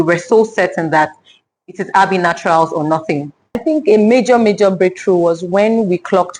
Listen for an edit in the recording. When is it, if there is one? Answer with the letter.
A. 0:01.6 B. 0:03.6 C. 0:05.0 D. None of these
B